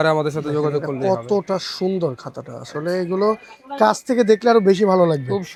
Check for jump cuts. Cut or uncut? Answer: uncut